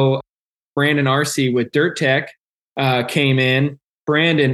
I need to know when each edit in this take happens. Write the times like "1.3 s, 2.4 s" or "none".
none